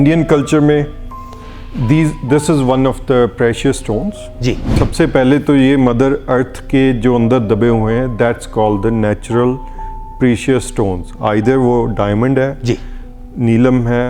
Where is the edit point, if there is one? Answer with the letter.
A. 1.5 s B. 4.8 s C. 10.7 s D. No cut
B